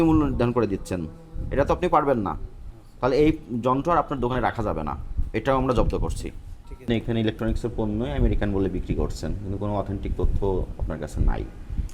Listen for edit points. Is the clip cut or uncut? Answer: uncut